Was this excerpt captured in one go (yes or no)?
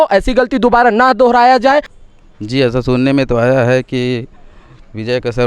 no